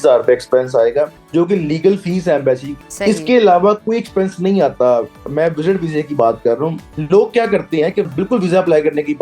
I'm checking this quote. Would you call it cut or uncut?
cut